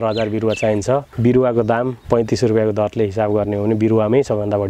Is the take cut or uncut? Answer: cut